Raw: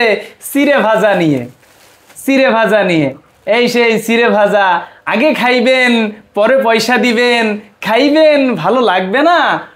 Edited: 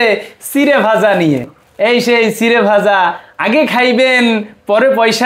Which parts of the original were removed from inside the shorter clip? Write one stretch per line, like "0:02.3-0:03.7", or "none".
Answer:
0:01.6-0:03.3